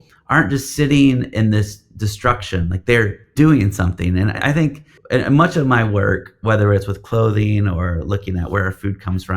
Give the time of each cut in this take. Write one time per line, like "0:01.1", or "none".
0:03.2
0:04.4